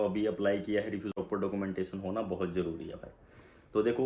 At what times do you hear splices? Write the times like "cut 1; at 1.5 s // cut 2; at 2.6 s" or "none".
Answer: cut 1; at 1.1 s

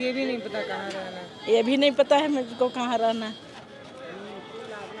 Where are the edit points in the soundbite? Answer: none

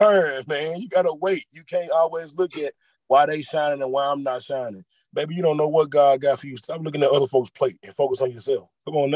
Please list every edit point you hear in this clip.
none

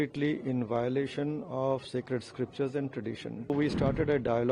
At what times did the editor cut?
cut 1; at 3.5 s

